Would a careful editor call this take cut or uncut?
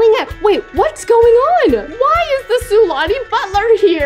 uncut